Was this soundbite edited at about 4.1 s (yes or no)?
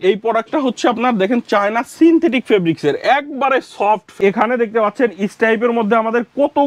yes